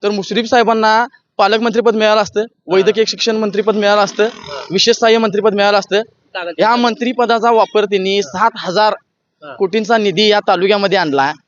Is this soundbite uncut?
yes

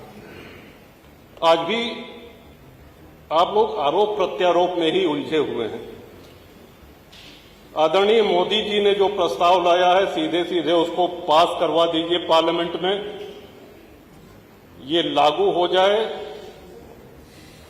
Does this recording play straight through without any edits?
yes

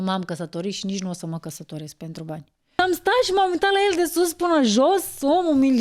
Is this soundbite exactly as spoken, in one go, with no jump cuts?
no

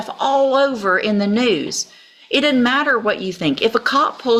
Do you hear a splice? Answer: no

